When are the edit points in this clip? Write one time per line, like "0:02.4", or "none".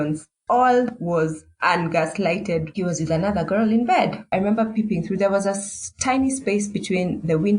0:02.7
0:04.2